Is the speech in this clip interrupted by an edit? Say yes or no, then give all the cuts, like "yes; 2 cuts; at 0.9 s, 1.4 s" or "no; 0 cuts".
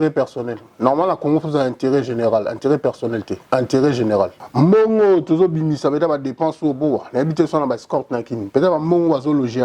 yes; 1 cut; at 4.4 s